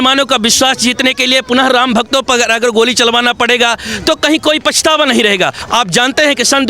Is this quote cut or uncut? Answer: cut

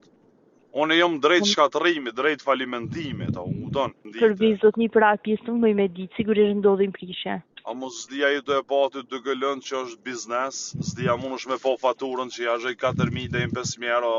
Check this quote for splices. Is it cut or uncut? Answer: cut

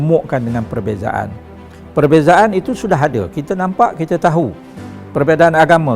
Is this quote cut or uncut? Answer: uncut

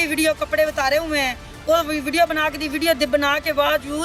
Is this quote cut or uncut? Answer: uncut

